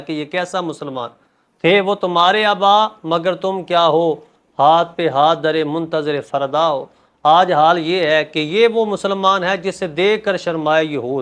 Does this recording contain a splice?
no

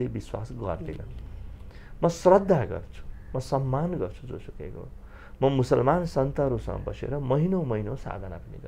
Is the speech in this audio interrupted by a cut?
no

